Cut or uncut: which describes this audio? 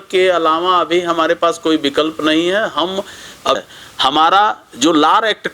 cut